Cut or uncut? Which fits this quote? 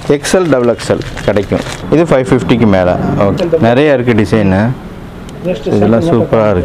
cut